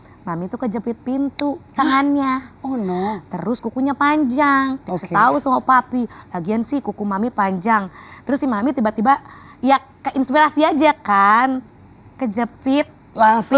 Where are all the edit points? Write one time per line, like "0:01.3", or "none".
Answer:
none